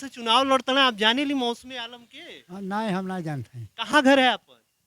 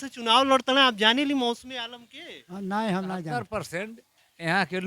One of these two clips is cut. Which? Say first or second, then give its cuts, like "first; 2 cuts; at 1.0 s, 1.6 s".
second; 1 cut; at 3.4 s